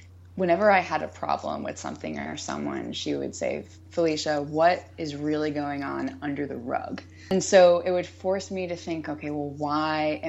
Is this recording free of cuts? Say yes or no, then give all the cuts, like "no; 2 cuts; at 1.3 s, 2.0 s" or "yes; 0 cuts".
no; 1 cut; at 7.3 s